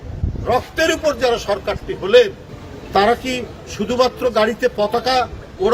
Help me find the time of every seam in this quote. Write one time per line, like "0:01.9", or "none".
none